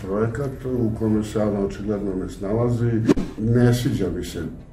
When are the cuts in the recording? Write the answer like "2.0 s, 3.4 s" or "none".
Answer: 3.2 s